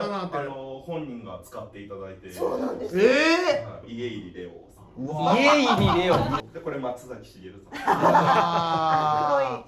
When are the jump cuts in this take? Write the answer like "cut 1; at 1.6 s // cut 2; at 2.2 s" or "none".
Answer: cut 1; at 3.9 s // cut 2; at 6.4 s